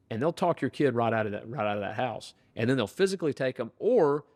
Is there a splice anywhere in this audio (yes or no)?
no